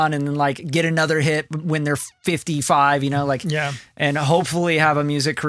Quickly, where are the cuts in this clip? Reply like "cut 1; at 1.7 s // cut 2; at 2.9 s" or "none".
none